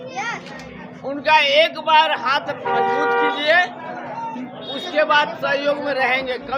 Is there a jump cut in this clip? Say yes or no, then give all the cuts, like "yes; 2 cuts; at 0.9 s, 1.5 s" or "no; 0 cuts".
no; 0 cuts